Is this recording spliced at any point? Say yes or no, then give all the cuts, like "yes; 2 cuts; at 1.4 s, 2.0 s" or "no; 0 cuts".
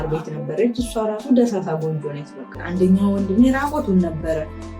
yes; 1 cut; at 2.6 s